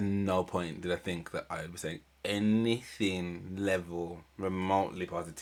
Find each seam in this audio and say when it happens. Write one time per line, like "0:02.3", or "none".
none